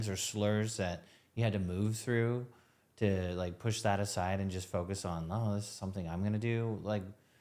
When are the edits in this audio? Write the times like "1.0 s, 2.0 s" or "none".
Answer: none